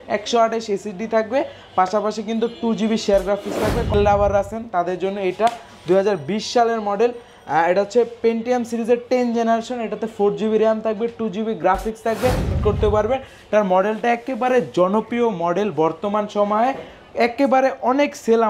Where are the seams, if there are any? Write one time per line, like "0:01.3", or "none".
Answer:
0:03.9
0:12.6